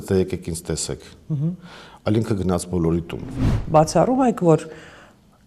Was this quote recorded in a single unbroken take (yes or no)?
no